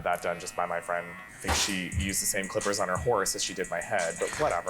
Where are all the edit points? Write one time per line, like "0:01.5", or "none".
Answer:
0:01.2